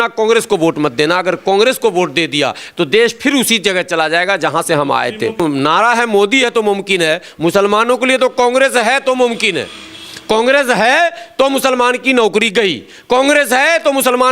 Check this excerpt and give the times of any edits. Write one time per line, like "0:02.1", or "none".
0:05.4